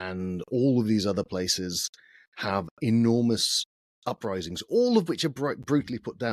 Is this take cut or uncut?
uncut